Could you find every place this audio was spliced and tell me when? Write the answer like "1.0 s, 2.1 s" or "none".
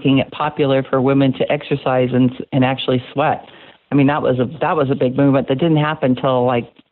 none